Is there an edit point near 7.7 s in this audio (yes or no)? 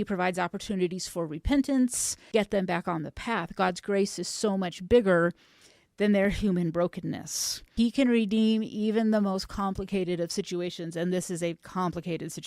yes